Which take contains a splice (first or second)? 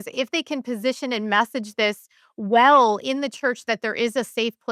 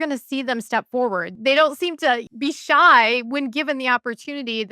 second